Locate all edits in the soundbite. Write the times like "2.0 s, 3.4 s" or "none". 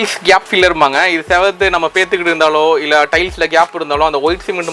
none